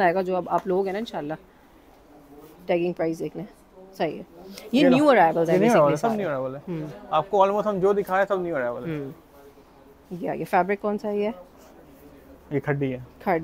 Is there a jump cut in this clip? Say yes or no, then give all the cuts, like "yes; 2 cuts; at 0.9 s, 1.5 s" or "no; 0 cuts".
no; 0 cuts